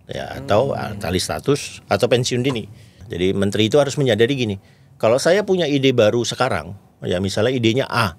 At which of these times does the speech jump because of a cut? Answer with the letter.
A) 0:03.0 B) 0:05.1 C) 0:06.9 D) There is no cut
A